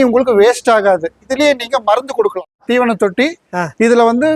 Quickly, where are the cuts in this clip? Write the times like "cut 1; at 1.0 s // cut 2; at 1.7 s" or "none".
cut 1; at 1.2 s // cut 2; at 2.6 s

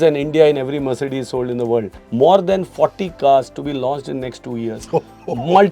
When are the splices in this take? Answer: cut 1; at 2.0 s

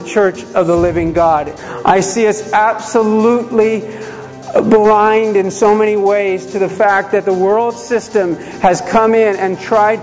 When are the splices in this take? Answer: cut 1; at 1.5 s

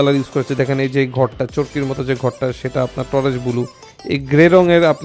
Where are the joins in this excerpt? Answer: none

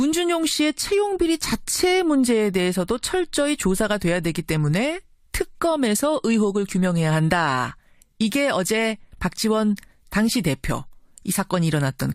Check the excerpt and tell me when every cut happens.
none

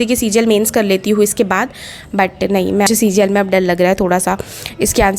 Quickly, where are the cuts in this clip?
cut 1; at 2.9 s

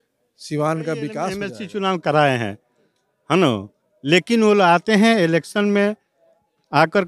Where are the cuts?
cut 1; at 1.5 s

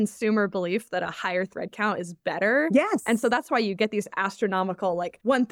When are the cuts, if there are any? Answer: none

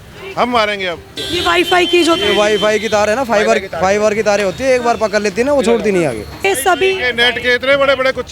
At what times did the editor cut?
cut 1; at 1.1 s // cut 2; at 6.4 s

